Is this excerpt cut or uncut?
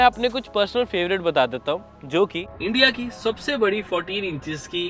uncut